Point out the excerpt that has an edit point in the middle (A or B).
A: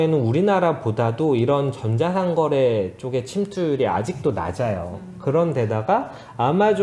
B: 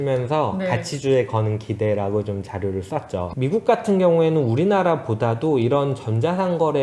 B